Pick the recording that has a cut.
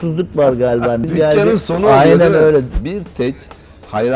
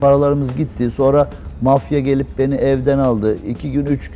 first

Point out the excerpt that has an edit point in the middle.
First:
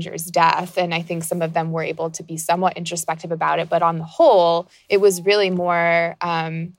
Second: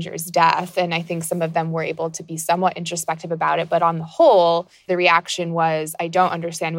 second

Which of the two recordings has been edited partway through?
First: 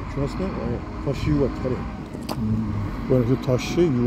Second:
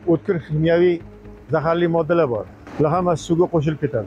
second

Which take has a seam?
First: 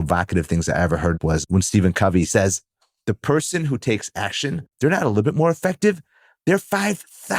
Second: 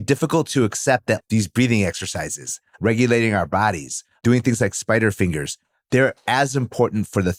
first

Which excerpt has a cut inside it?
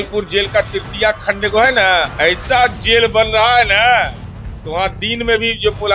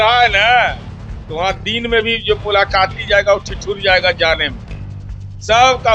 first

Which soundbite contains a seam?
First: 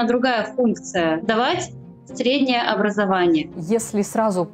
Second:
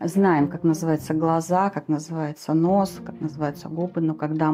first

